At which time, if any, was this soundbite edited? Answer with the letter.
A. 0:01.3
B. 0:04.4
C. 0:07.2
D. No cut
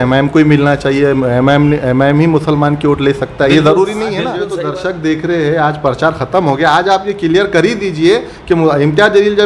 B